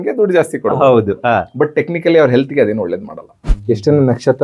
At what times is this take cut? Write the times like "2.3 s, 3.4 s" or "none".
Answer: 3.5 s

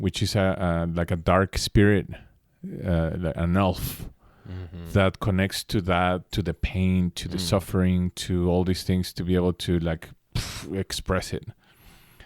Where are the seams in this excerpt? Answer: none

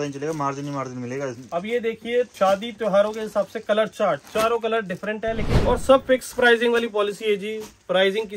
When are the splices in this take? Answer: 1.4 s, 2.3 s, 5.5 s

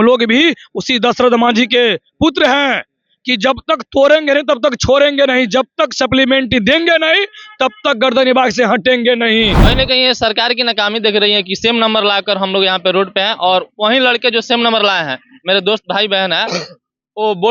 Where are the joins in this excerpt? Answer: 9.6 s

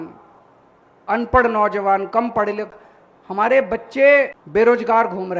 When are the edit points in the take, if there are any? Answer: 4.4 s

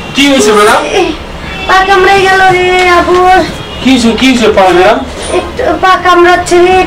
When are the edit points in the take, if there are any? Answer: none

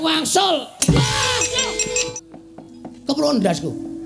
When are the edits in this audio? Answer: 2.1 s

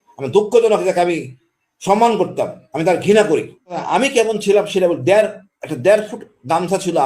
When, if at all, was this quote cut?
3.8 s

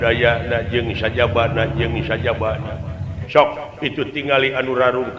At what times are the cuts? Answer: 3.2 s

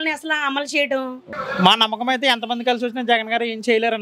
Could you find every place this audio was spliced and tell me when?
1.3 s

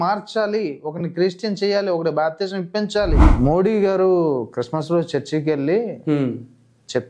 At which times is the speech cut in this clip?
3.3 s

